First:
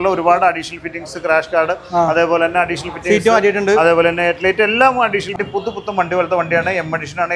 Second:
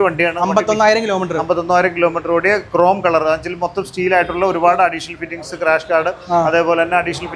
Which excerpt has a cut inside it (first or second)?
first